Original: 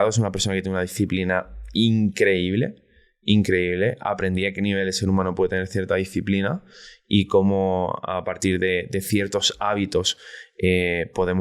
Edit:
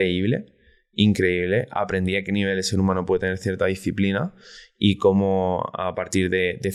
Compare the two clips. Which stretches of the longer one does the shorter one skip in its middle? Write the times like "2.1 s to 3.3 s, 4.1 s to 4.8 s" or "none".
none